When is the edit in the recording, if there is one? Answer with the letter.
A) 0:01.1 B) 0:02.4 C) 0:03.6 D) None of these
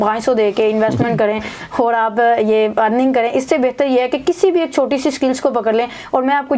D